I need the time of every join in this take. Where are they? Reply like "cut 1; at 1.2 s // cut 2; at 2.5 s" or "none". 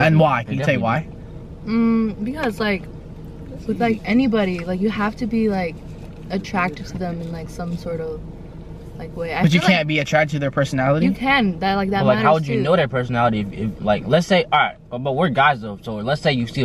none